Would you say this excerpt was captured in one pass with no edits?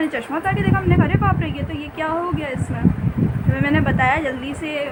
yes; 0 cuts

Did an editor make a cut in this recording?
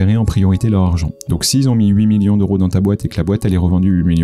no; 0 cuts

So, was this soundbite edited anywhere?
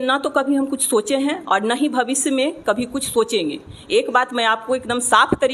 no; 0 cuts

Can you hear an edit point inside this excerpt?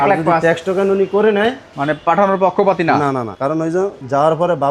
yes; 2 cuts; at 1.7 s, 3.5 s

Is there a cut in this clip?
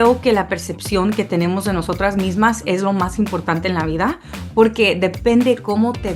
no; 0 cuts

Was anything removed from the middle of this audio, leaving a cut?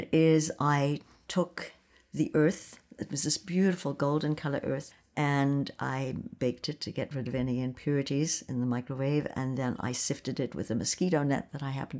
no; 0 cuts

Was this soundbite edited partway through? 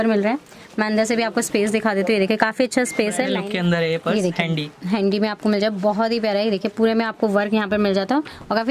yes; 1 cut; at 3.4 s

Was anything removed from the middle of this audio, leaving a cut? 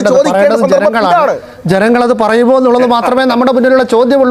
no; 0 cuts

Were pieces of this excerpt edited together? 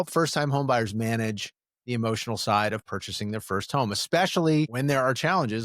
yes; 1 cut; at 4.7 s

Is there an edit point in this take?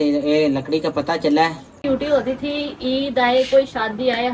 yes; 1 cut; at 1.8 s

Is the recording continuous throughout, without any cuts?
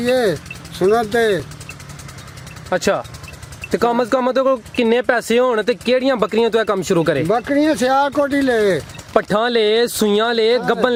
yes; 0 cuts

